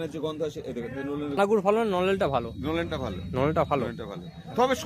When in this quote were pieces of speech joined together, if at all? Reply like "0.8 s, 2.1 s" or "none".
1.4 s